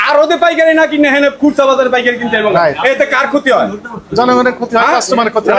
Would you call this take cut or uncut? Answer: uncut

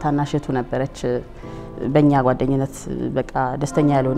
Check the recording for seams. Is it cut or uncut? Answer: uncut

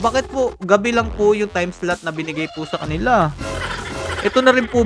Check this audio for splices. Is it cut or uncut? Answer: uncut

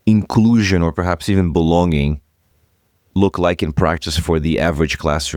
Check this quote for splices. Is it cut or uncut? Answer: uncut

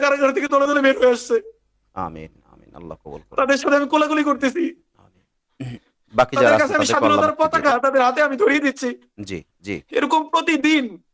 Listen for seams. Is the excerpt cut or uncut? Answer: uncut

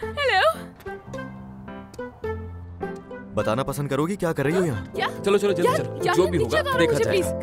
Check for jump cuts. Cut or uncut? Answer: cut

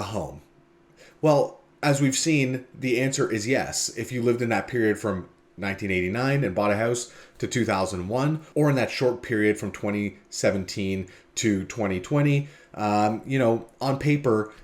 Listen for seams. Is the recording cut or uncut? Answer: uncut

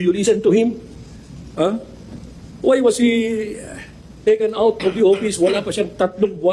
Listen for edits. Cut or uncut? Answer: uncut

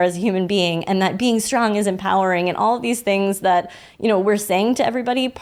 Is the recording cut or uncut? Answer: uncut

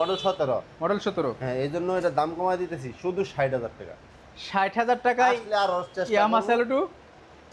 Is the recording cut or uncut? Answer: uncut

